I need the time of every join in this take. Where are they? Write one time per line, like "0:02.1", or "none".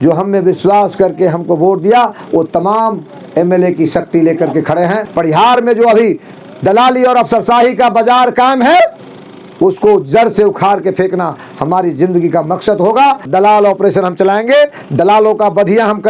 0:05.1
0:13.3